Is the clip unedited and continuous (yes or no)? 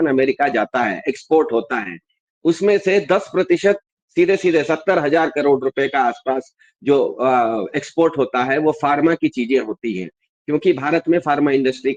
yes